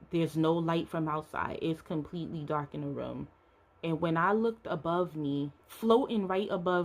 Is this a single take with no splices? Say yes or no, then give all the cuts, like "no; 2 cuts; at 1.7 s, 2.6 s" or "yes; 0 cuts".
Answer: no; 1 cut; at 5.6 s